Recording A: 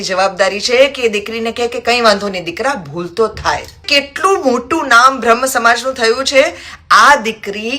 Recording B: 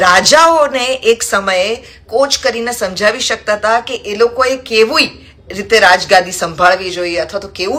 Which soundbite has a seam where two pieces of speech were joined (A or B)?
A